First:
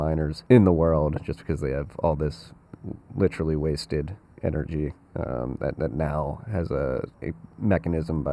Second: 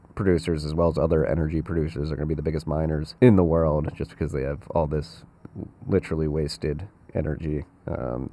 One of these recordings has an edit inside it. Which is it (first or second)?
first